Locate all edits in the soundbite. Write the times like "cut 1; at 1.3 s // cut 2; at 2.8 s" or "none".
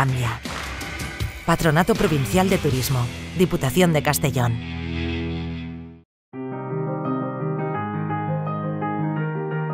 cut 1; at 5.9 s